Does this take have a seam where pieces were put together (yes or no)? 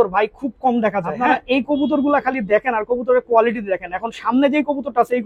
yes